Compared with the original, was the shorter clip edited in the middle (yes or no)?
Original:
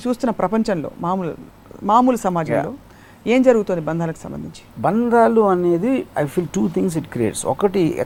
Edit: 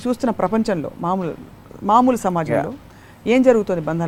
no